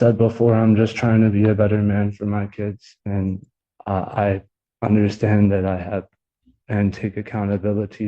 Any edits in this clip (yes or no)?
no